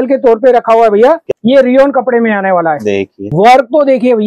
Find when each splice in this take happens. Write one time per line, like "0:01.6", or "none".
0:01.2
0:03.2